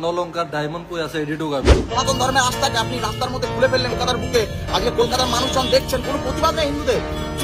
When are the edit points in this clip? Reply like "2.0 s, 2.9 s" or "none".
1.9 s